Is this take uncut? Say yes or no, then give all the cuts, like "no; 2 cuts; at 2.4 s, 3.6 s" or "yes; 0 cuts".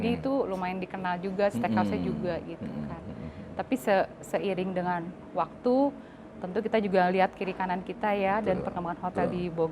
yes; 0 cuts